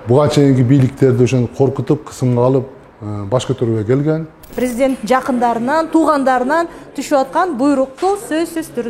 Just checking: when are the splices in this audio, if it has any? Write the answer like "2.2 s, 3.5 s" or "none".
4.4 s